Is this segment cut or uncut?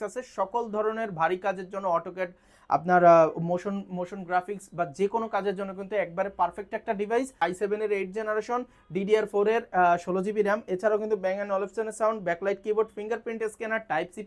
uncut